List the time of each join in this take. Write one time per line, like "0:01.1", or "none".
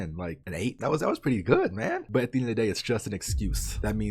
none